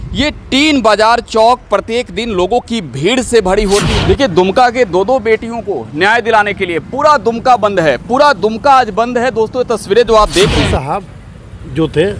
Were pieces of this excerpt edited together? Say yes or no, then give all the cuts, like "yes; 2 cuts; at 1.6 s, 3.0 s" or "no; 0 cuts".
yes; 2 cuts; at 3.9 s, 10.5 s